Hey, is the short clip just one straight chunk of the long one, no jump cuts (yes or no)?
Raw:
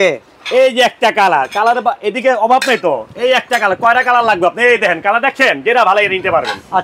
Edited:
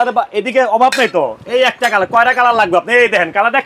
yes